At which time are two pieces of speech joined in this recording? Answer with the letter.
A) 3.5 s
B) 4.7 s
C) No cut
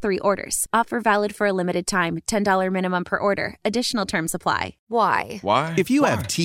B